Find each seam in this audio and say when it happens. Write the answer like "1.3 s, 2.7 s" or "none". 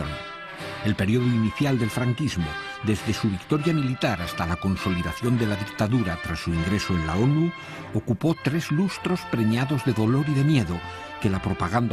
9.2 s

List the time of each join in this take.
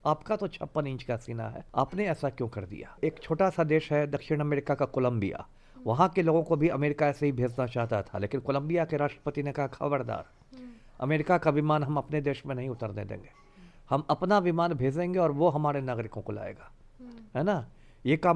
1.6 s, 3.0 s

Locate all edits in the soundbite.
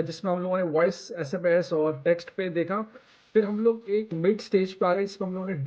4.2 s

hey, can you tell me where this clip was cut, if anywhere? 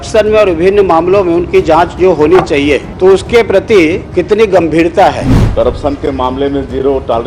2.9 s, 4.0 s, 5.3 s

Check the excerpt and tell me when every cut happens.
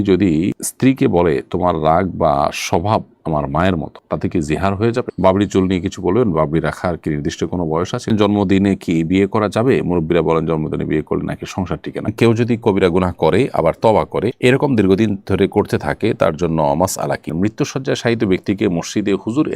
5.1 s, 8.1 s, 12.1 s, 17.3 s

